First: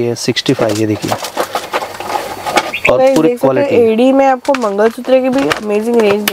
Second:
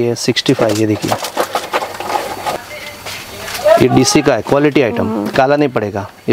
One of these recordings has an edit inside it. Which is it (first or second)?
second